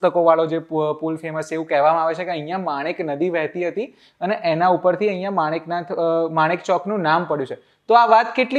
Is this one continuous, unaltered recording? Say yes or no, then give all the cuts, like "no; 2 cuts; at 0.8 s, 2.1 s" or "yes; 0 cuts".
yes; 0 cuts